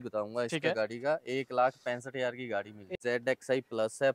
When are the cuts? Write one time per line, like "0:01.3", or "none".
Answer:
0:02.9